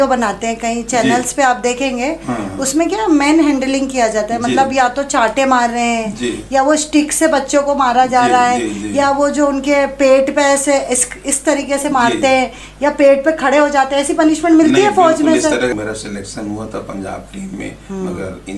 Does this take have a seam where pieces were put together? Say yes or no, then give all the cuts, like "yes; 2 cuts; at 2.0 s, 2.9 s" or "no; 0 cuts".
yes; 1 cut; at 15.7 s